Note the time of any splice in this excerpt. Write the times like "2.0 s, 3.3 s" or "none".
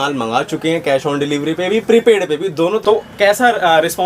2.8 s